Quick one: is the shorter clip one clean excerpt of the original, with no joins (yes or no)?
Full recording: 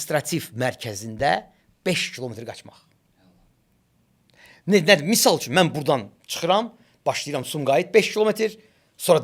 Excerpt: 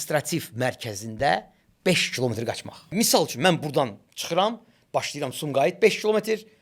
no